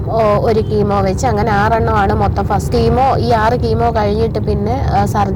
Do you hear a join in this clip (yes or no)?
no